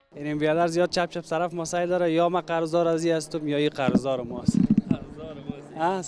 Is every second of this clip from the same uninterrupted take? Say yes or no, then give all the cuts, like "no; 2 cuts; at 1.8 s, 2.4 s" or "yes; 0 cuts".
yes; 0 cuts